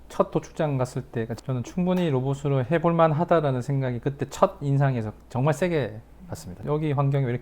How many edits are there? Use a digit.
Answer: 2